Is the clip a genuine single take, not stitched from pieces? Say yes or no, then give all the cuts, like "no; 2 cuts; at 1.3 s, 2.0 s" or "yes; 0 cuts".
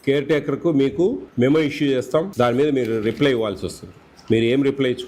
no; 2 cuts; at 1.2 s, 2.3 s